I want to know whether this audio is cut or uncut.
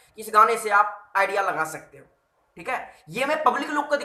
uncut